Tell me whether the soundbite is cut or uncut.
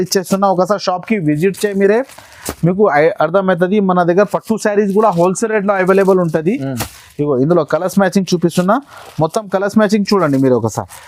uncut